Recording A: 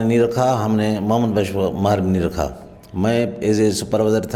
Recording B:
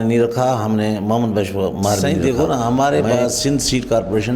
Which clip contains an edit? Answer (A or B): B